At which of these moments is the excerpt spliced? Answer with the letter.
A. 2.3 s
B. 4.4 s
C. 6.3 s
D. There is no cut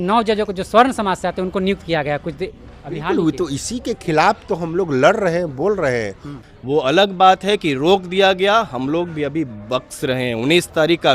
C